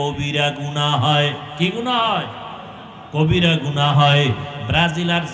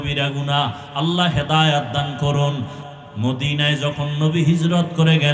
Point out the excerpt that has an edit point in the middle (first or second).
second